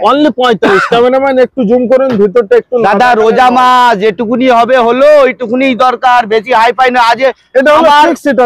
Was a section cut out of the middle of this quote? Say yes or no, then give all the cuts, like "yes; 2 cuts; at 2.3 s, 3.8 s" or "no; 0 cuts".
no; 0 cuts